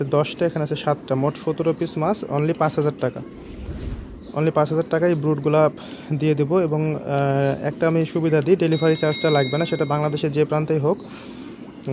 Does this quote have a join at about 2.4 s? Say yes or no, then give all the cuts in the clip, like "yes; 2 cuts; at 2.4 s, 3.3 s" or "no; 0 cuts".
no; 0 cuts